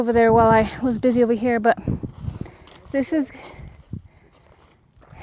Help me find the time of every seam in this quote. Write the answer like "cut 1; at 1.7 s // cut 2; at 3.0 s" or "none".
none